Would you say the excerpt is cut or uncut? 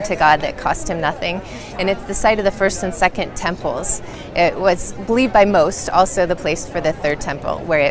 cut